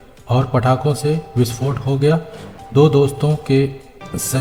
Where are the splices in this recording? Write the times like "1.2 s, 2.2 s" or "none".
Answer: none